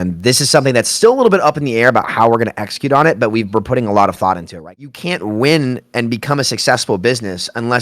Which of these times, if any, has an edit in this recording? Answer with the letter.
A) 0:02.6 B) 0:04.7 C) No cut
B